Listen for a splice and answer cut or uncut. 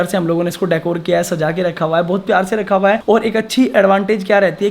uncut